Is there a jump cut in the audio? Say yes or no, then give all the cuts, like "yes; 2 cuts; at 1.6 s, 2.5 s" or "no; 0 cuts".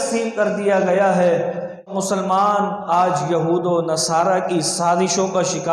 yes; 1 cut; at 1.9 s